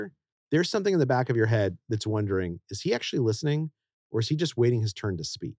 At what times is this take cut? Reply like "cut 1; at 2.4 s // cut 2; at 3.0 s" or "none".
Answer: none